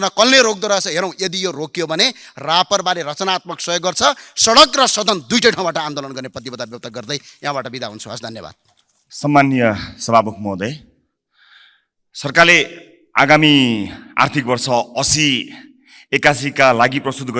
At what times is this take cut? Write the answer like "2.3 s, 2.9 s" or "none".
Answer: none